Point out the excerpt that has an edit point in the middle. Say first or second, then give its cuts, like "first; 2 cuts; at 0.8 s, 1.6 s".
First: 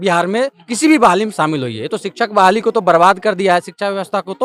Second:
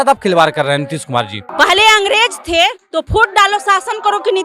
second; 1 cut; at 1.4 s